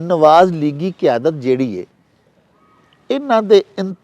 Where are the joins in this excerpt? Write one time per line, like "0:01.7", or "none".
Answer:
none